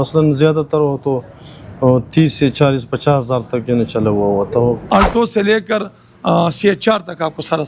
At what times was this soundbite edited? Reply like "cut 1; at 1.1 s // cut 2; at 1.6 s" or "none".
cut 1; at 4.9 s